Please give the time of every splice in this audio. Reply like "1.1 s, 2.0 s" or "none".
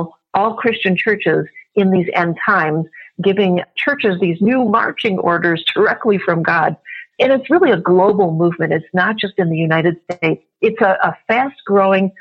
10.4 s